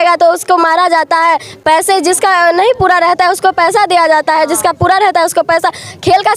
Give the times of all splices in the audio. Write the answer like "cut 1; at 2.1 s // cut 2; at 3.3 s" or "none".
none

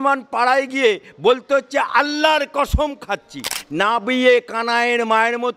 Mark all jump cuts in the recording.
cut 1; at 3.6 s

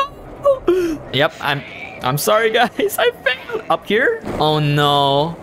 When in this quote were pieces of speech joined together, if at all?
cut 1; at 1.0 s // cut 2; at 4.2 s

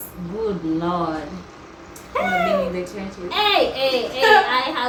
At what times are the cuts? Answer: none

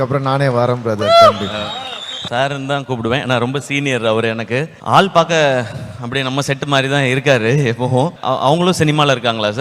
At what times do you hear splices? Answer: cut 1; at 2.2 s // cut 2; at 4.8 s // cut 3; at 8.2 s

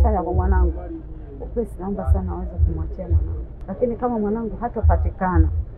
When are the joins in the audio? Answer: cut 1; at 3.5 s

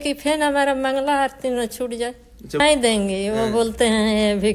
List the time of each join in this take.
cut 1; at 2.6 s

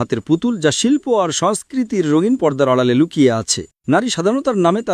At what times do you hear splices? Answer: cut 1; at 3.7 s

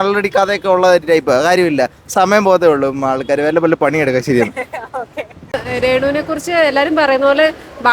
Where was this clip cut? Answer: cut 1; at 5.6 s

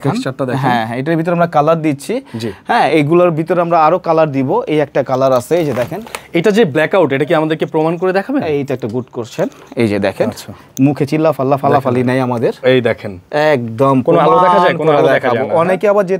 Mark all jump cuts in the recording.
none

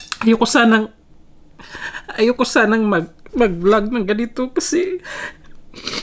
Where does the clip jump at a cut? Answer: none

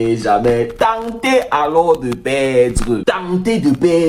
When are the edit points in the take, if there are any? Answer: cut 1; at 3.0 s

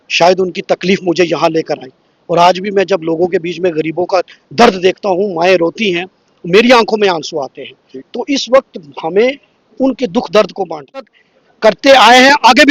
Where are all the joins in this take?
cut 1; at 11.2 s

